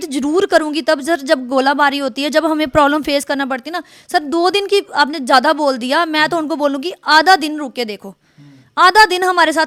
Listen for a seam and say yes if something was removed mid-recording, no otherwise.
no